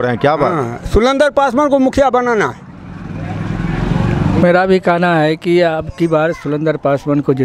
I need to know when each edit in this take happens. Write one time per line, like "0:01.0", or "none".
0:04.4